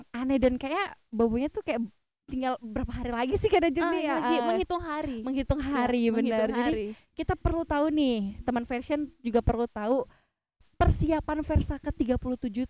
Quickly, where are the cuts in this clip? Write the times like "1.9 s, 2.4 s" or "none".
none